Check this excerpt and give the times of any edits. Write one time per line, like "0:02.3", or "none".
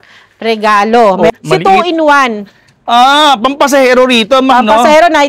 0:01.3